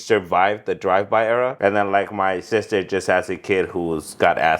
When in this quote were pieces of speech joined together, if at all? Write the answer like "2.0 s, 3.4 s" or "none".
1.5 s